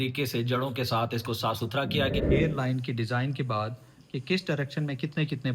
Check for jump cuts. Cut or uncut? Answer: cut